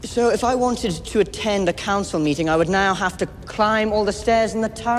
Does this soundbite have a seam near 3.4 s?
no; 0 cuts

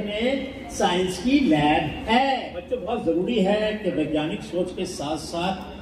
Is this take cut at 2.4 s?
yes; 1 cut; at 2.4 s

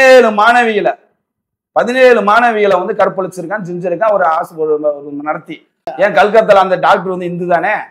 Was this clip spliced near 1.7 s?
no; 1 cut; at 5.9 s

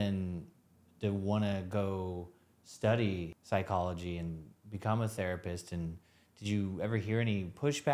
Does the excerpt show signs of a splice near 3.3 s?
yes; 1 cut; at 3.3 s

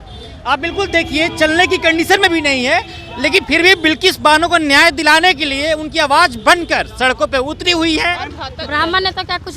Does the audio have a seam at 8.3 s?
yes; 1 cut; at 8.3 s

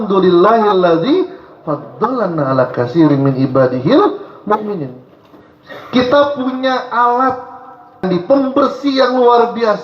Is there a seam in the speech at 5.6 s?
no; 1 cut; at 8.0 s

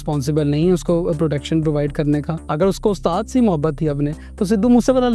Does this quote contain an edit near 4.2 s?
no; 1 cut; at 2.4 s

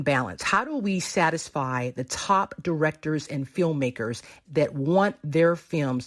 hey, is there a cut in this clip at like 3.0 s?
no; 1 cut; at 4.4 s

